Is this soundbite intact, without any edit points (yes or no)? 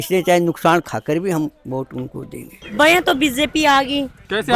no